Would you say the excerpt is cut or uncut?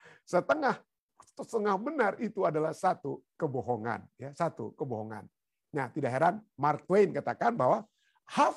uncut